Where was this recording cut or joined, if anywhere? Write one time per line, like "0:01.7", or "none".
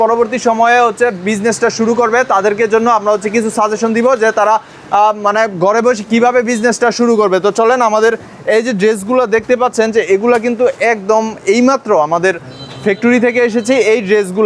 none